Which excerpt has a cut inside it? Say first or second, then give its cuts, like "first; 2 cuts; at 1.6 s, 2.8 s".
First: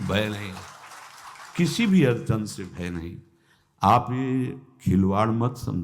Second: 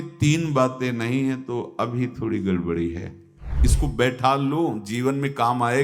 second; 1 cut; at 3.5 s